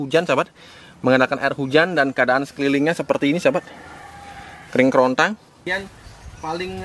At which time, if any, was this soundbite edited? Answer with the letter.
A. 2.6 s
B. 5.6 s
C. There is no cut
B